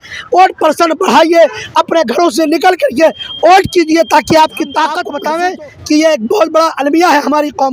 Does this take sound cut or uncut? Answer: cut